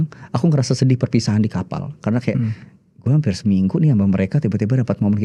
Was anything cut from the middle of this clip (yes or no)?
no